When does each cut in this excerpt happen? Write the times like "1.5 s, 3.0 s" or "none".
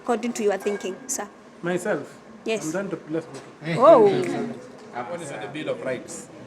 5.3 s